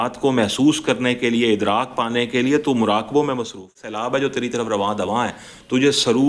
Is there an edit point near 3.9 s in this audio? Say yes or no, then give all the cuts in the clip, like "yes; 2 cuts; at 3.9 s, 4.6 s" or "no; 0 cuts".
yes; 1 cut; at 3.9 s